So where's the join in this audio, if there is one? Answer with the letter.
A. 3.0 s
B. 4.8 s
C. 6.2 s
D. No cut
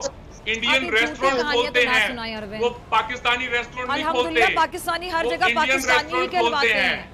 D